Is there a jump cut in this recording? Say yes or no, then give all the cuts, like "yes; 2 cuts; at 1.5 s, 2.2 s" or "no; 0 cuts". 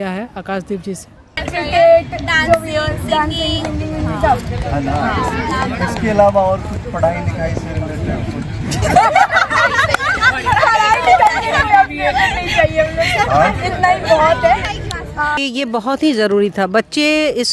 yes; 2 cuts; at 1.4 s, 15.3 s